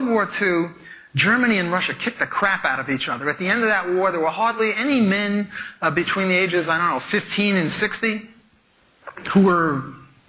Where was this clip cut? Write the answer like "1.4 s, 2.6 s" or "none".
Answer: 4.1 s